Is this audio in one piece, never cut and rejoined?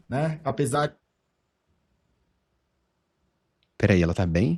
yes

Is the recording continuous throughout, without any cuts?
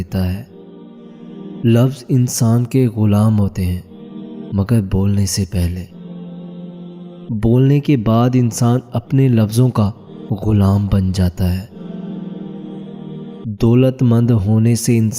yes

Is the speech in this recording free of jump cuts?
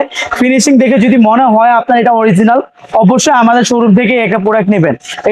yes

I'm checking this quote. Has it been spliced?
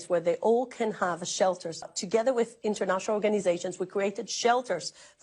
yes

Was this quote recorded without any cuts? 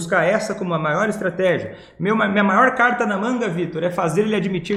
yes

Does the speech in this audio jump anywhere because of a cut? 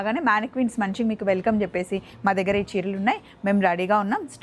no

